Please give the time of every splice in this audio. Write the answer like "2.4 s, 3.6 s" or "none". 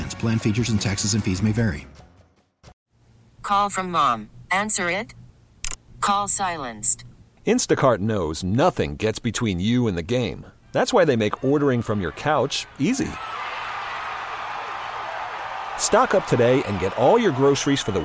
2.7 s